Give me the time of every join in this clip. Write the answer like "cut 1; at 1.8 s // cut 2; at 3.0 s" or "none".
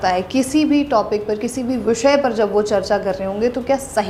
none

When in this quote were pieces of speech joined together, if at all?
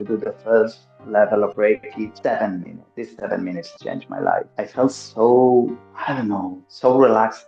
cut 1; at 2.1 s // cut 2; at 4.5 s

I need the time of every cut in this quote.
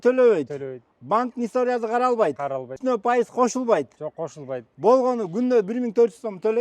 cut 1; at 2.7 s

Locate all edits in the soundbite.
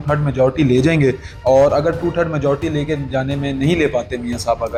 none

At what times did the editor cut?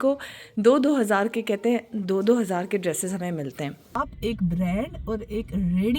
cut 1; at 3.9 s

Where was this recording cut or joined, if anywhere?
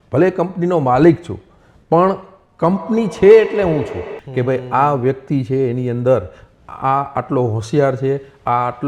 cut 1; at 4.1 s

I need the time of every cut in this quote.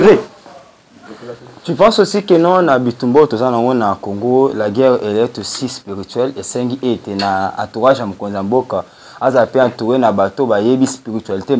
cut 1; at 1.2 s

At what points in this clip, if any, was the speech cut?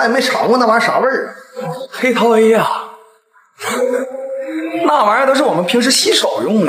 none

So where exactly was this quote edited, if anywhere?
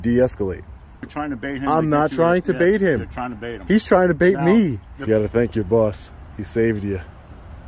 cut 1; at 1.1 s // cut 2; at 4.9 s

